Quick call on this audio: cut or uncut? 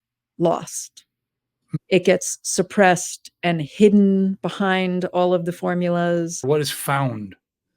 cut